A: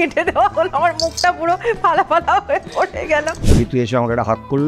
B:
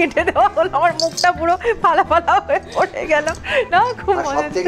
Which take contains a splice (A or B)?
A